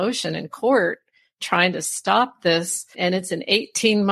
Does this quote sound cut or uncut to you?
cut